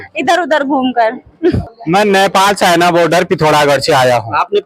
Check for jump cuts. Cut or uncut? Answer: cut